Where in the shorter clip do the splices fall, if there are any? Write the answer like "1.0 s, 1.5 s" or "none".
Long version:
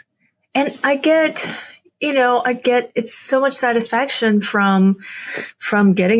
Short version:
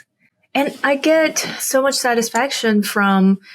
1.6 s